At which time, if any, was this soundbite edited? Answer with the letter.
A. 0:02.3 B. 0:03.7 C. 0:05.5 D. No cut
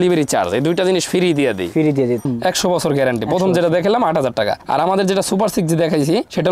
A